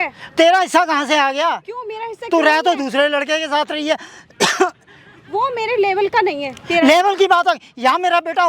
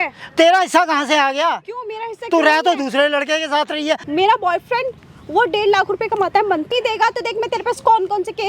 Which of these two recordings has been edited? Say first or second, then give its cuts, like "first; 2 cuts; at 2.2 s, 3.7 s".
second; 2 cuts; at 4.0 s, 6.7 s